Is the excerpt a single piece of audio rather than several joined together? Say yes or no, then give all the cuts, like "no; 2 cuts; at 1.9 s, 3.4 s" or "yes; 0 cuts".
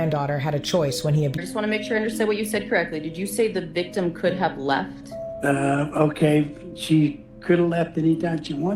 no; 1 cut; at 1.4 s